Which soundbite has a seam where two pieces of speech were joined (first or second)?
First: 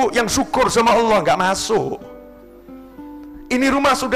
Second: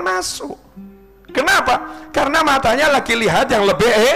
first